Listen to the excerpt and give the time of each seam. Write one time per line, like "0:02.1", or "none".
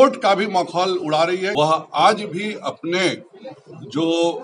0:01.5

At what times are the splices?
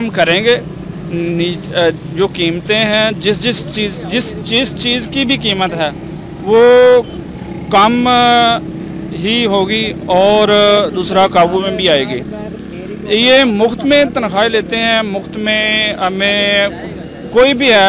none

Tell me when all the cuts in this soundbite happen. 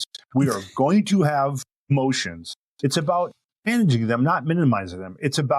0:01.9
0:03.7

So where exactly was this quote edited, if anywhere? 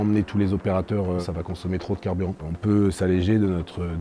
0:01.2
0:02.4

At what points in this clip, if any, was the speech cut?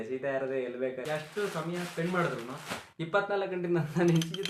0:01.0

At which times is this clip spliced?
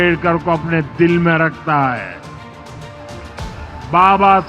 none

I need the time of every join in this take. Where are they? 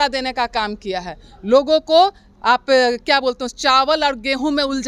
none

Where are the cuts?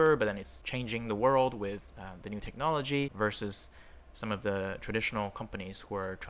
none

